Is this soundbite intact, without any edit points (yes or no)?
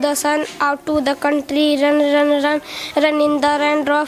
yes